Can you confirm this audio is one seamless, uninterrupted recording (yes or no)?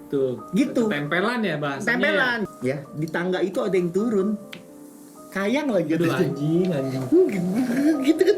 no